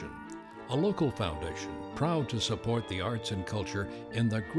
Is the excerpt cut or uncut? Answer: uncut